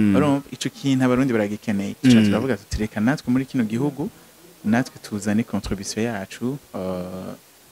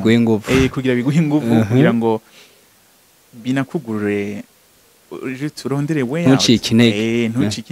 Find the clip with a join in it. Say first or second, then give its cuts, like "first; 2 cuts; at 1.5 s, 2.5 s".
first; 1 cut; at 1.9 s